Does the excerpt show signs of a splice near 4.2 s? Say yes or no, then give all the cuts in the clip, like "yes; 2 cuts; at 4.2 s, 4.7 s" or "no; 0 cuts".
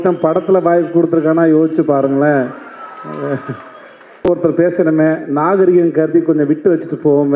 yes; 1 cut; at 4.2 s